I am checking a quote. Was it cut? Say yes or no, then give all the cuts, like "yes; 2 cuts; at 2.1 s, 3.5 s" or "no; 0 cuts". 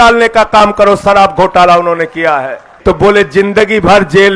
yes; 1 cut; at 2.7 s